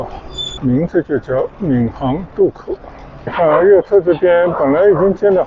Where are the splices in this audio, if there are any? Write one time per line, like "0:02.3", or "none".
0:03.3